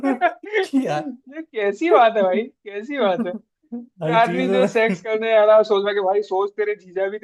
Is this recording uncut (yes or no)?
yes